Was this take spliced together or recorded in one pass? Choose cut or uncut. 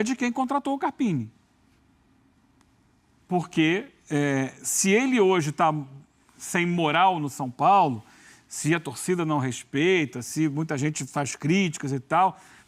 uncut